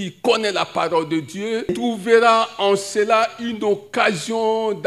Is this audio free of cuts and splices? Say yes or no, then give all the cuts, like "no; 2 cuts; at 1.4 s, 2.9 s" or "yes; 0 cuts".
no; 1 cut; at 1.7 s